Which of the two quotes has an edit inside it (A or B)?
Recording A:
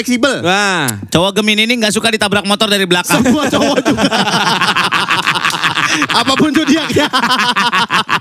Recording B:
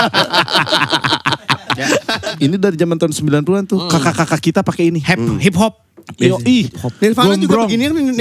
B